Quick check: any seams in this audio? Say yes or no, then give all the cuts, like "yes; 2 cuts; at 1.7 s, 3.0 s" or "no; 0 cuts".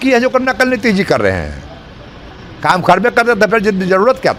no; 0 cuts